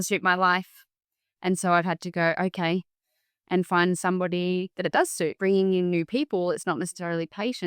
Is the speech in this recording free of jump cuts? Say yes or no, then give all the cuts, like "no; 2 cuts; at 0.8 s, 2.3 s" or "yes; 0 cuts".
no; 1 cut; at 5.4 s